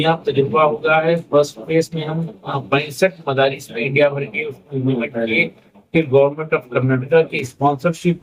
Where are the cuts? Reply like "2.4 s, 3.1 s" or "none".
none